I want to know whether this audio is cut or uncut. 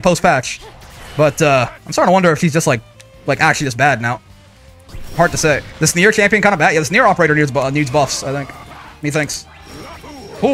cut